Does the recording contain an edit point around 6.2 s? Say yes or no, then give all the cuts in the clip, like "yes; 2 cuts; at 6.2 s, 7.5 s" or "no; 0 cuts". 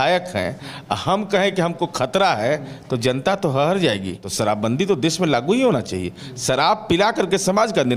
no; 1 cut; at 4.2 s